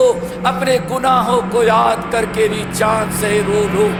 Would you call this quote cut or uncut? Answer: uncut